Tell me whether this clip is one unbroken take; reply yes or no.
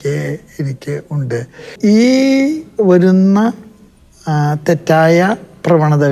no